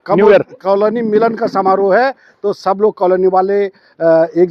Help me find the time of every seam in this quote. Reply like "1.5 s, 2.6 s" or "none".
none